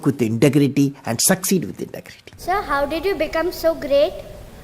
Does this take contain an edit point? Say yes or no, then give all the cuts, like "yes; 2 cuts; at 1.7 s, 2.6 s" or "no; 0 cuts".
yes; 1 cut; at 2.4 s